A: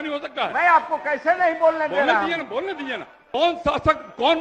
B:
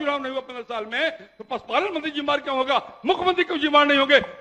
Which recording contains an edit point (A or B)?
A